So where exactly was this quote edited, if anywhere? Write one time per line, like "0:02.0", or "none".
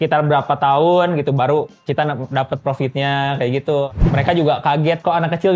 0:04.0